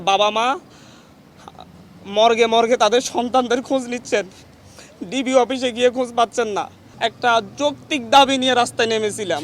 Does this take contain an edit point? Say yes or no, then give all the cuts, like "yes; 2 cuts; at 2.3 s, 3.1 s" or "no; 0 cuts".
yes; 1 cut; at 6.8 s